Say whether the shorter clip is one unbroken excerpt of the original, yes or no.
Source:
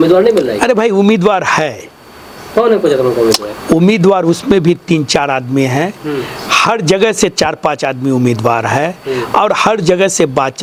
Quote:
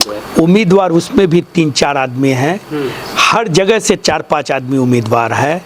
yes